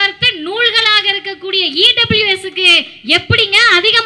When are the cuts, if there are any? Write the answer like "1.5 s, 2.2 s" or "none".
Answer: none

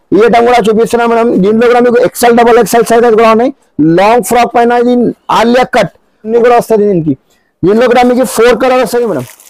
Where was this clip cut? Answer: 6.3 s

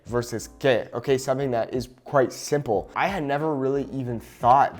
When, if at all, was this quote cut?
2.9 s

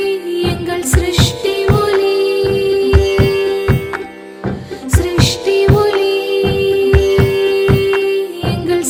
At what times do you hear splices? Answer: none

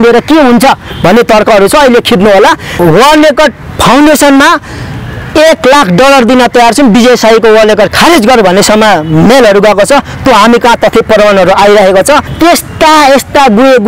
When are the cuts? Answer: 2.7 s, 12.3 s

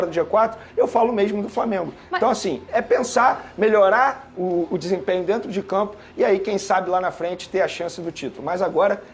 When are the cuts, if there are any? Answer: none

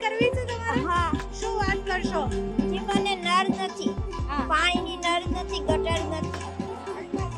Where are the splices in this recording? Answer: none

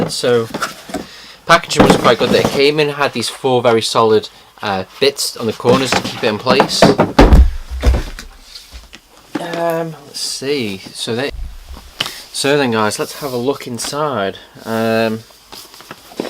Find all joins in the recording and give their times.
2.7 s

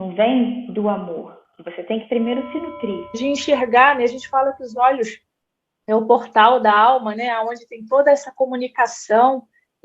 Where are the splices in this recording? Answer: 3.2 s

